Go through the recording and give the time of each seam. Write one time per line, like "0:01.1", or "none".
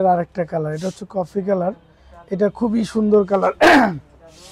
none